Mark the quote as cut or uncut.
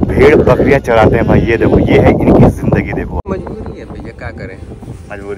cut